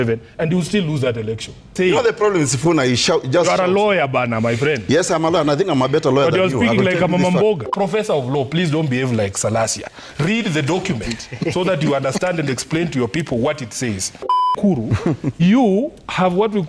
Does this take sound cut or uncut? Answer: cut